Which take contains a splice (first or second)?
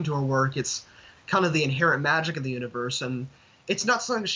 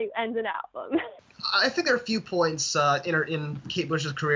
second